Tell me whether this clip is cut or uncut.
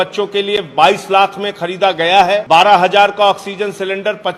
cut